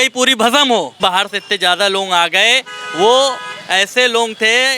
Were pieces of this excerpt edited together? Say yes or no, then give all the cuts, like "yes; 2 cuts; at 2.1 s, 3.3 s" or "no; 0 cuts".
yes; 1 cut; at 1.0 s